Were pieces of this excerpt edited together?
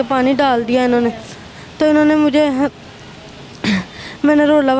no; 0 cuts

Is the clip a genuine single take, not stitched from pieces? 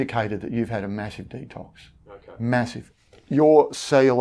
no; 1 cut; at 2.8 s

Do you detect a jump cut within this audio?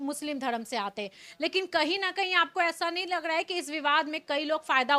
no; 0 cuts

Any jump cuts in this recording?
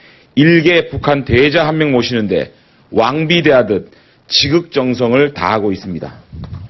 yes; 1 cut; at 1.8 s

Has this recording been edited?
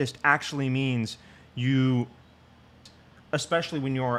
no; 0 cuts

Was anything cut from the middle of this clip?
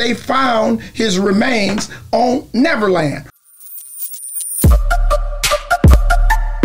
yes; 1 cut; at 3.3 s

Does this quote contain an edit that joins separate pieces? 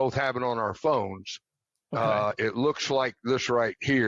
no; 0 cuts

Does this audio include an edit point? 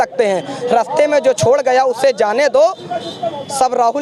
no; 0 cuts

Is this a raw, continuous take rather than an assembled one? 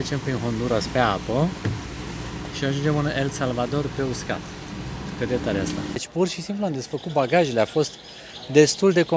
no; 1 cut; at 6.0 s

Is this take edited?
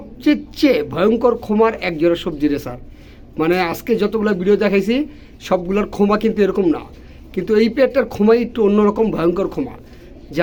no; 0 cuts

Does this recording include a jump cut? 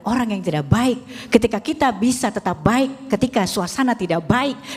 no; 0 cuts

